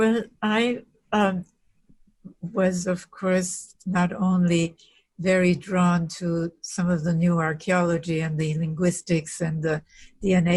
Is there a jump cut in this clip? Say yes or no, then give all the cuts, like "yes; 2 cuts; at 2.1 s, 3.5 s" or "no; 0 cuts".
no; 0 cuts